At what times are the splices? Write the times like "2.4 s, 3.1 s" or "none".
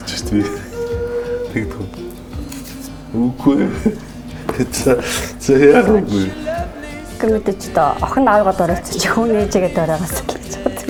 none